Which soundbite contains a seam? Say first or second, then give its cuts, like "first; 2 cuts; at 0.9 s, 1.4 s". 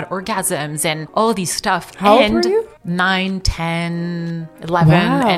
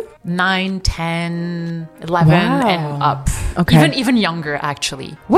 first; 1 cut; at 1.0 s